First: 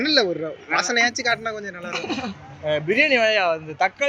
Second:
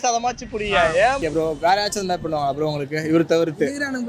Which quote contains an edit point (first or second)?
second